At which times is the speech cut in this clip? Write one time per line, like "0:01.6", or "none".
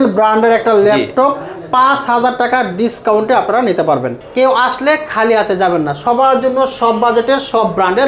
0:04.2